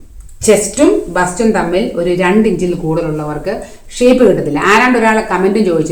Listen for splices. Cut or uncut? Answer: uncut